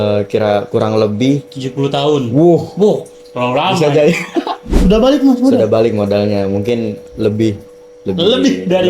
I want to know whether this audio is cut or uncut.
cut